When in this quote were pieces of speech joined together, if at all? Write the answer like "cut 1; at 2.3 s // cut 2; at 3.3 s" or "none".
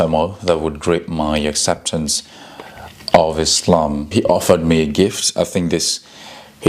cut 1; at 4.1 s